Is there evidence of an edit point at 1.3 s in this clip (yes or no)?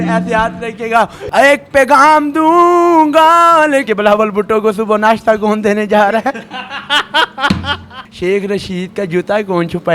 yes